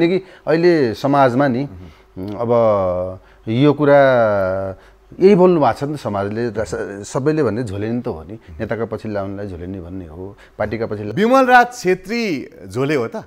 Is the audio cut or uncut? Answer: uncut